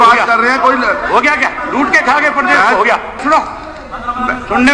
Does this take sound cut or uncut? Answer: cut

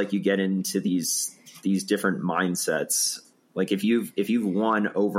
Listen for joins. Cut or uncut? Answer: cut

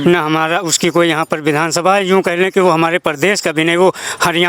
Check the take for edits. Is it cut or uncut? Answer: uncut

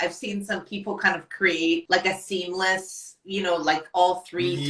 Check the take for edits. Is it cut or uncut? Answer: cut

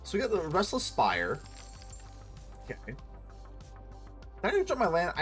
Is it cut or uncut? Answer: uncut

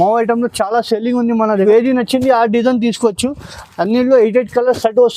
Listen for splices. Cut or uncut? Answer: cut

